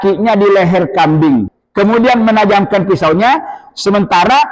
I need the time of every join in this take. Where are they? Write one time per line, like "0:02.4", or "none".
0:01.6